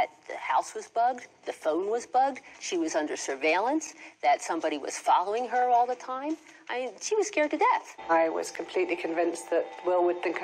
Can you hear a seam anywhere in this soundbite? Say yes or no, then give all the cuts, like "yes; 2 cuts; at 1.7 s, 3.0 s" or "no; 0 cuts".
yes; 1 cut; at 7.9 s